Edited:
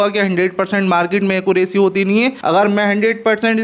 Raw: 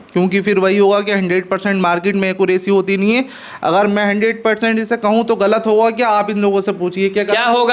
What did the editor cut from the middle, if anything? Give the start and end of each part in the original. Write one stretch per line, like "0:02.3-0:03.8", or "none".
0:03.3-0:03.6